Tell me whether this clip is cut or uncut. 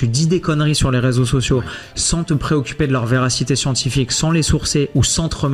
uncut